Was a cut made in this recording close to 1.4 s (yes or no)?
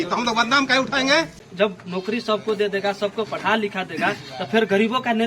yes